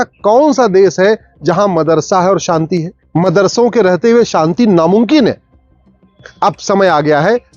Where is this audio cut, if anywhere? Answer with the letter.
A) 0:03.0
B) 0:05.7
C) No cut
A